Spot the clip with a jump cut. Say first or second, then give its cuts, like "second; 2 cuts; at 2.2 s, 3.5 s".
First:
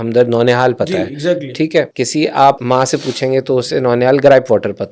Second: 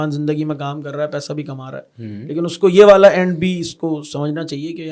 first; 2 cuts; at 1.9 s, 2.6 s